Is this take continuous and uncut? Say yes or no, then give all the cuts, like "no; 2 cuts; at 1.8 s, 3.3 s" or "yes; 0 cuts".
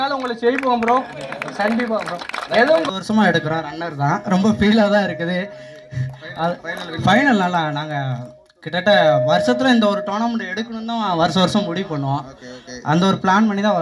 no; 1 cut; at 2.8 s